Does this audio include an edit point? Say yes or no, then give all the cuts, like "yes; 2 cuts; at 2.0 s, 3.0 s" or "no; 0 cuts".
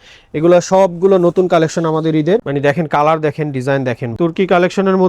yes; 2 cuts; at 2.4 s, 4.1 s